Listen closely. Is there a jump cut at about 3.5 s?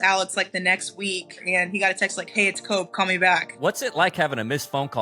yes; 2 cuts; at 1.4 s, 3.5 s

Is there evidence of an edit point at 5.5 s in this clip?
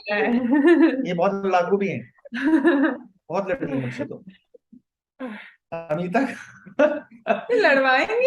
yes; 1 cut; at 5.5 s

